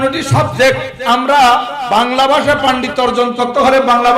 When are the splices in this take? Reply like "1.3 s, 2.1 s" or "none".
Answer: 0.9 s, 1.8 s

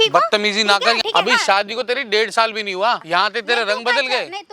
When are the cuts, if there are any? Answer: 1.0 s, 3.0 s

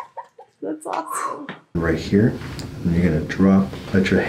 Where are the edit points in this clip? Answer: 1.8 s

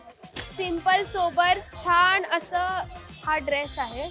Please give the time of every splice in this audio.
1.7 s

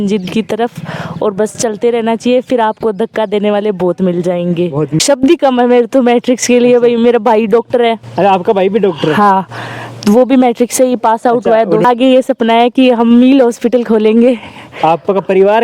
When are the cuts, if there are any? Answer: 5.0 s, 11.8 s

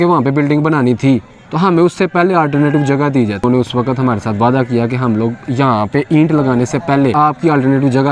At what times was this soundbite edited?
3.4 s, 7.1 s

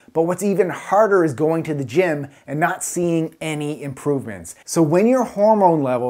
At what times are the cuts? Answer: 4.6 s

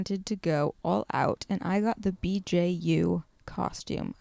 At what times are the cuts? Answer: none

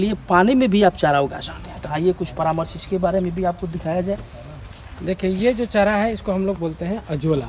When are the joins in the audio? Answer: none

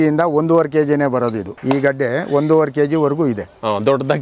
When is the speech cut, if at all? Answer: none

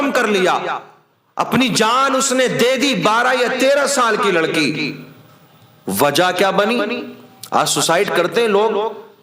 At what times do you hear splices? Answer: none

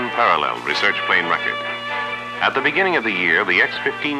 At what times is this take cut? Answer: 1.2 s

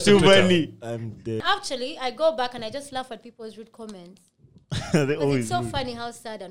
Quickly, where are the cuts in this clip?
1.4 s

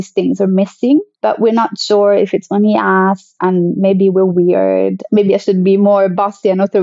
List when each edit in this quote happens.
1.1 s, 5.0 s

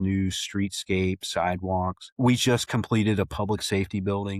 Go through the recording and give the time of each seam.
2.0 s

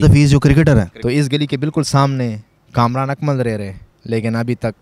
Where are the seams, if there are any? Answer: 0.9 s

